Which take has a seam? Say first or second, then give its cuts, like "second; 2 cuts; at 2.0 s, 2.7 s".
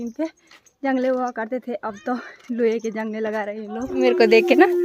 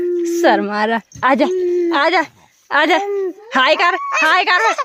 first; 1 cut; at 4.0 s